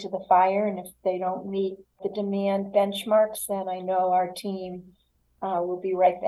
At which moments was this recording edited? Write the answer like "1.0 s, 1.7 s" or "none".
2.0 s

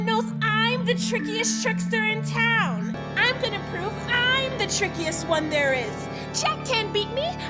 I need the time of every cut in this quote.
3.0 s

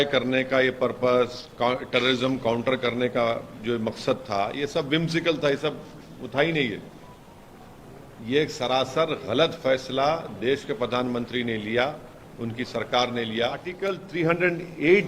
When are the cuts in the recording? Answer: 13.9 s

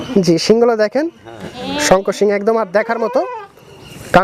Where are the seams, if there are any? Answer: none

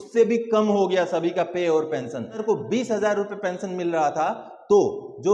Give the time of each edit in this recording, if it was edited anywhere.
2.4 s

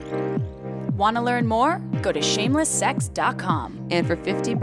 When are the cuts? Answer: 1.0 s

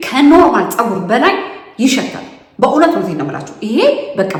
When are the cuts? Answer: none

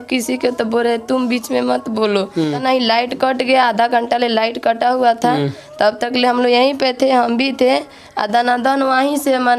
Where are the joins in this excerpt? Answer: 2.6 s

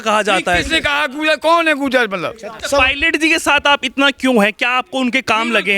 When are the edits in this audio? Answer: 2.6 s

